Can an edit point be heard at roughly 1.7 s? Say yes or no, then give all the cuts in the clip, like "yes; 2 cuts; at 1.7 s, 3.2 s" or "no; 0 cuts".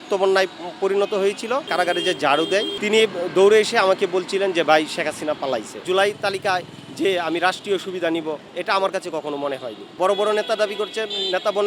yes; 4 cuts; at 1.7 s, 2.7 s, 5.8 s, 9.8 s